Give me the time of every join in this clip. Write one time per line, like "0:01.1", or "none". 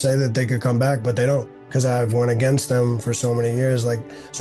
0:02.0